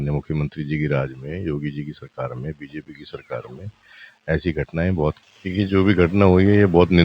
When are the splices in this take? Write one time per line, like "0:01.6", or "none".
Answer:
0:05.2

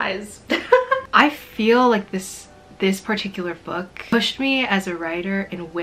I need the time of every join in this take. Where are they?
0:01.0

